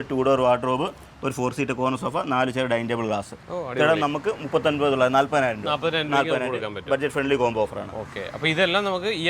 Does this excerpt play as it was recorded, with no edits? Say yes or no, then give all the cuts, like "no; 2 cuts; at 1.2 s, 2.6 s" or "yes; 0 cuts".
yes; 0 cuts